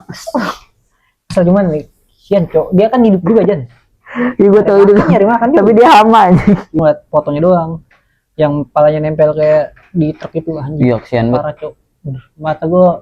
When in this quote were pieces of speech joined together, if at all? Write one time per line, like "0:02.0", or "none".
0:06.8